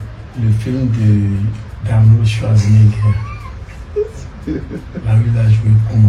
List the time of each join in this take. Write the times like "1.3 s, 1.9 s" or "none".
none